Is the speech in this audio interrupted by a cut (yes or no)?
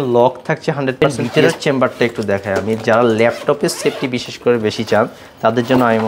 yes